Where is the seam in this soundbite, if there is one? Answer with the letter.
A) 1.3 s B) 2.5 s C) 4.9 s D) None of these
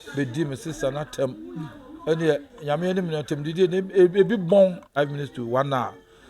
C